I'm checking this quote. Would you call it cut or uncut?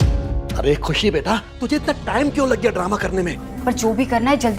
cut